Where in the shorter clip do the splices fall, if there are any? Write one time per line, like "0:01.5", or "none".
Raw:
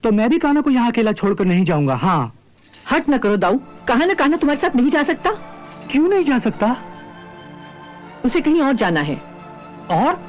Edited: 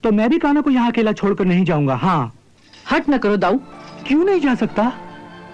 0:03.7

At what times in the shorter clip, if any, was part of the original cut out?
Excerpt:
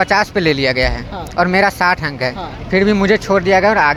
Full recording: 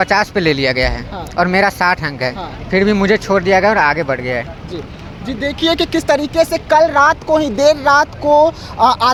none

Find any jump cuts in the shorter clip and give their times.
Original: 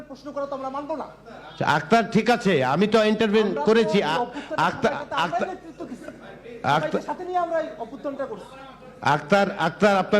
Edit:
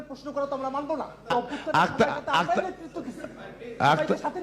0:01.3

